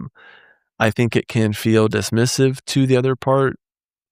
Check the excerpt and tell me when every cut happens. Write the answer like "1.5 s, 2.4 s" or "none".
none